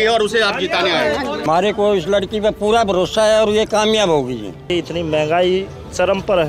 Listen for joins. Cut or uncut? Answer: cut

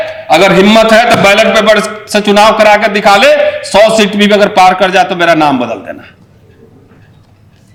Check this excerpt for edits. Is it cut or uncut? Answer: uncut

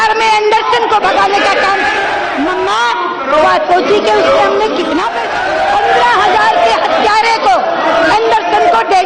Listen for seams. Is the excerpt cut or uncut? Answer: cut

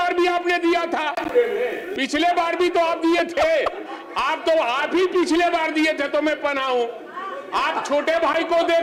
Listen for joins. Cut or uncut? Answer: uncut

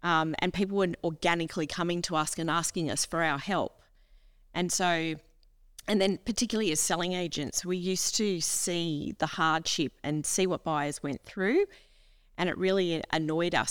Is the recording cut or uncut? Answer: uncut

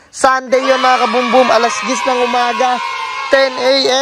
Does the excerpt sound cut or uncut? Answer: uncut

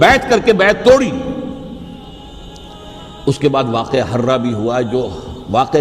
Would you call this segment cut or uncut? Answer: cut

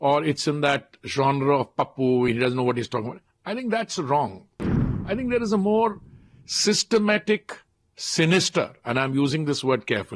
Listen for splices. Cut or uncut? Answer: uncut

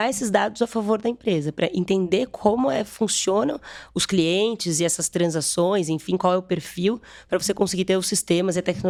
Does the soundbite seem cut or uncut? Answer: uncut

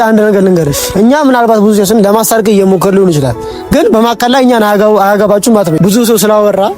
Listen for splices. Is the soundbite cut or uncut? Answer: cut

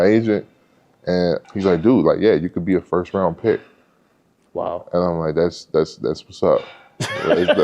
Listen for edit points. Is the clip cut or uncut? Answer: cut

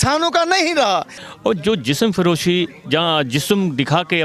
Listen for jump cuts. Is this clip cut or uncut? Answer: cut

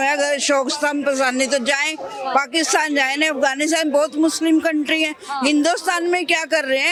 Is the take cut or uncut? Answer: uncut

